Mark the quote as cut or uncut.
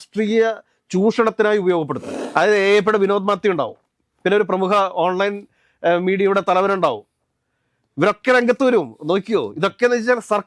cut